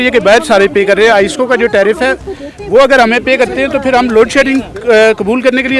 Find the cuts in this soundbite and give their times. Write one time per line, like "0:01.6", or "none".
none